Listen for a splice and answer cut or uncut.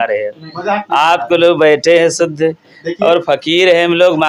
uncut